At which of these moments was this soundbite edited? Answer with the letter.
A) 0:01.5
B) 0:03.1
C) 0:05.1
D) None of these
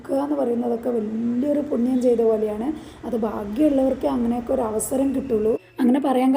D